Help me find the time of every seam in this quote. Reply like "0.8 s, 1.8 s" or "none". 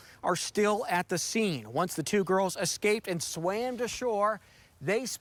none